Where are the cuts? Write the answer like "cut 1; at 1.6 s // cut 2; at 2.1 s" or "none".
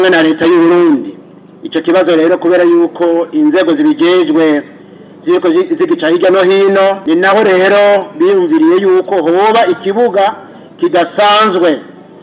cut 1; at 7.0 s